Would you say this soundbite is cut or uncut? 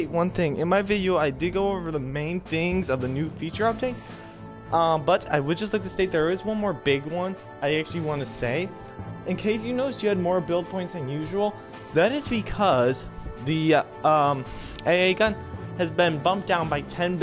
uncut